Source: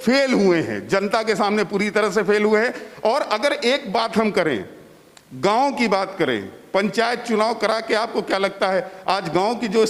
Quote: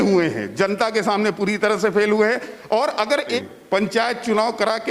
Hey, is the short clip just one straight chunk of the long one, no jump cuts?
no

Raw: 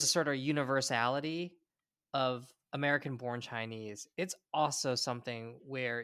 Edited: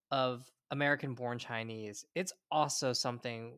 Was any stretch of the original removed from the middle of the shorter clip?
no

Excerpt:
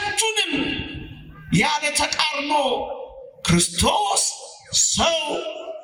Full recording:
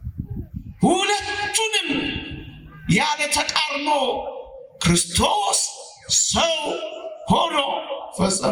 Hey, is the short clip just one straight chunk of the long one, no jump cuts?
yes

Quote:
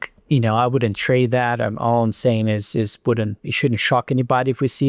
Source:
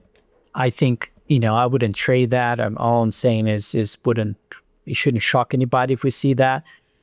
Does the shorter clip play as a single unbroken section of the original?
no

